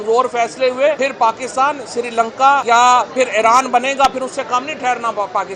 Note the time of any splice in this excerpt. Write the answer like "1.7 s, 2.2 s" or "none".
1.0 s, 2.6 s